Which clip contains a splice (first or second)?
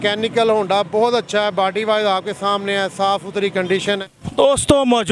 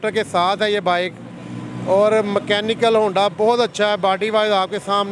first